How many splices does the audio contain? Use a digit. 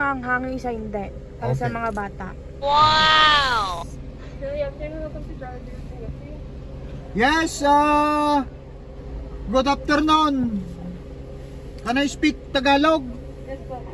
0